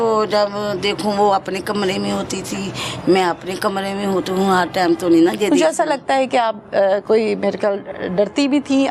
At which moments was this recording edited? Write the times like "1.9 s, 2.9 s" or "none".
none